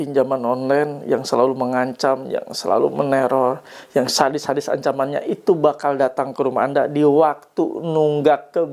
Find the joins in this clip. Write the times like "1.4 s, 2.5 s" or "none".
none